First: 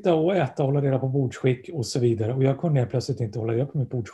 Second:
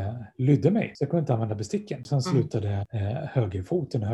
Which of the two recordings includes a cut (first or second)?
second